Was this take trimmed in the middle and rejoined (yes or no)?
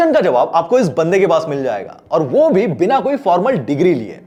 no